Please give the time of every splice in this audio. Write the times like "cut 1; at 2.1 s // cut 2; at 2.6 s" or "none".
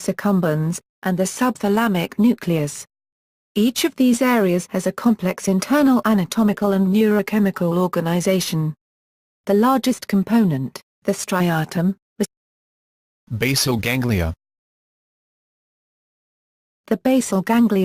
none